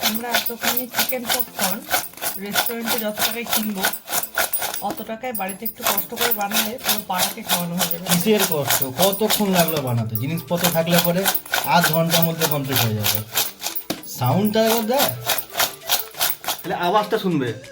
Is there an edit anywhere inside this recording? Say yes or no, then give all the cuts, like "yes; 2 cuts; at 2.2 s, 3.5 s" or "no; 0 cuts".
yes; 1 cut; at 16.6 s